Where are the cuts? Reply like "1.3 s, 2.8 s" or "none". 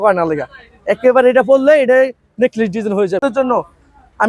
3.2 s